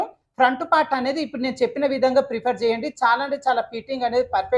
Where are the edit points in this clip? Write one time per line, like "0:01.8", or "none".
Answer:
none